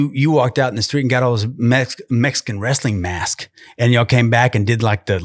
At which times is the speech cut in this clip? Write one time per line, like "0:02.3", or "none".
none

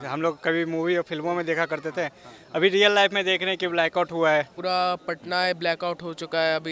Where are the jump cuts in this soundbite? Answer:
0:04.5

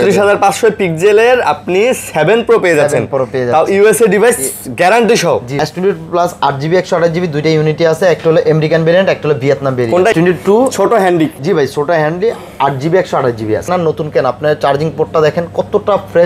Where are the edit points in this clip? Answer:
0:05.6
0:10.1
0:13.7

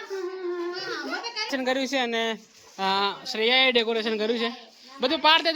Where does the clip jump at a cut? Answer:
0:01.5

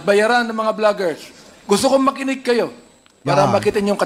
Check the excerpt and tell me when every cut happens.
none

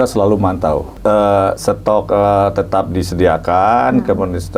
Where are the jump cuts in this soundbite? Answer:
0:00.9

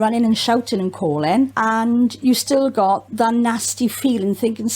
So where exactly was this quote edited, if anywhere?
0:01.5
0:03.1

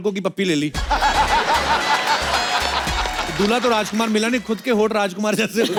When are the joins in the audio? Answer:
none

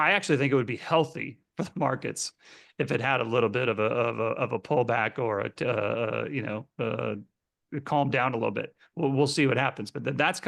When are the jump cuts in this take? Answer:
none

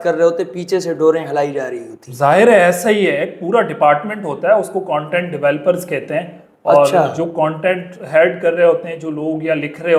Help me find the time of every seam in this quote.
none

